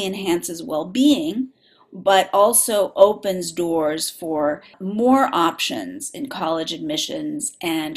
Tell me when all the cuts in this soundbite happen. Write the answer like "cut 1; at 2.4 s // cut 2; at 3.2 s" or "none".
cut 1; at 4.8 s